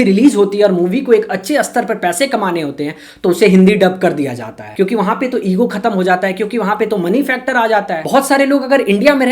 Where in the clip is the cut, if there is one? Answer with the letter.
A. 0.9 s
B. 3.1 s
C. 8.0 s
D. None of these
C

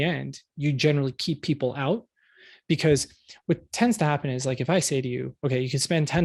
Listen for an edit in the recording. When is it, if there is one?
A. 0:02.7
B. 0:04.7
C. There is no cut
C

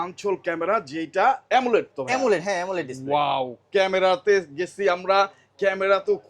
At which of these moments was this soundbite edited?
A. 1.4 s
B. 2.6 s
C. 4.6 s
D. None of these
D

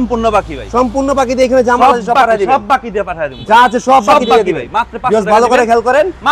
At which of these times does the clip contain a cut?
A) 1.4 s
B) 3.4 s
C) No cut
C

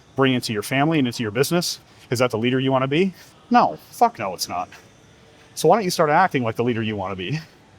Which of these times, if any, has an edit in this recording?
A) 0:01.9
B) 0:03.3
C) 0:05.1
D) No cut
B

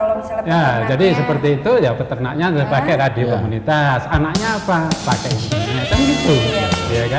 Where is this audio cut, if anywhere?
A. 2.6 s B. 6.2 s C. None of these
C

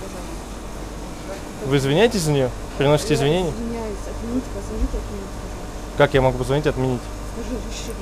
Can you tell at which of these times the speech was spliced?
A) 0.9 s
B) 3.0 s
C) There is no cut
C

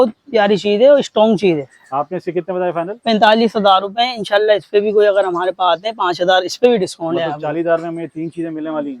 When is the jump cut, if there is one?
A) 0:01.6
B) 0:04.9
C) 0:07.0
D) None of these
D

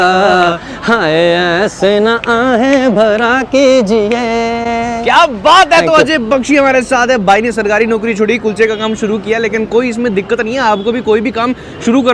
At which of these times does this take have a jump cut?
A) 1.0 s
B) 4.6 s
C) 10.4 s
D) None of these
D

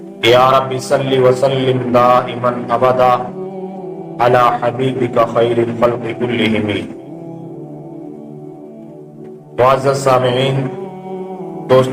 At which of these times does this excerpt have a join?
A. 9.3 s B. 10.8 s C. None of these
C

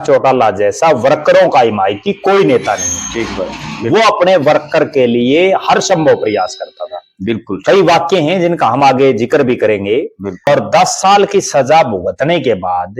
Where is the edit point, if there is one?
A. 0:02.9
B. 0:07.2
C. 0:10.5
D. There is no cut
C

